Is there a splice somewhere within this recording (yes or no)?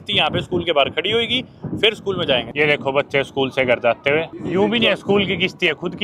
yes